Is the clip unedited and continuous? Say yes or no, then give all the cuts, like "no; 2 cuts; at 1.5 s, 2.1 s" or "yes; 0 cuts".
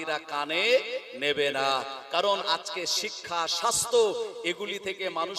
yes; 0 cuts